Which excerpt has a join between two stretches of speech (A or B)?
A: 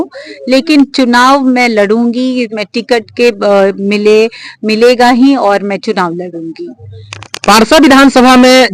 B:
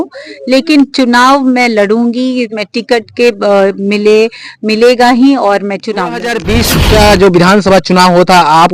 B